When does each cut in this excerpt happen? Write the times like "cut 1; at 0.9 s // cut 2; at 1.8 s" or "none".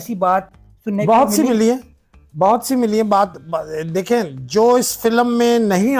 none